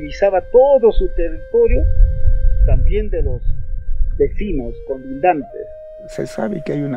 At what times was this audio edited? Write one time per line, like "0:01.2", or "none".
0:05.9